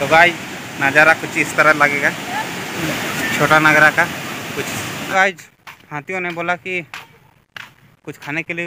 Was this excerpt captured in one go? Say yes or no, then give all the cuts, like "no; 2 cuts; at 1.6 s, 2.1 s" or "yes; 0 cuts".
no; 2 cuts; at 2.7 s, 4.9 s